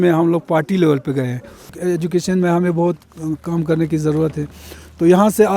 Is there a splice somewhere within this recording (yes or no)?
yes